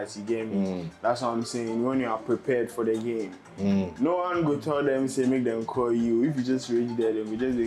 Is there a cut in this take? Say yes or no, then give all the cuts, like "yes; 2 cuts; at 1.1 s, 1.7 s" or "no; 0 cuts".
no; 0 cuts